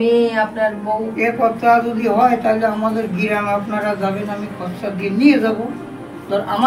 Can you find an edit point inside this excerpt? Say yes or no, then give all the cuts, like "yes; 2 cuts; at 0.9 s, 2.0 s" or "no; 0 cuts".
no; 0 cuts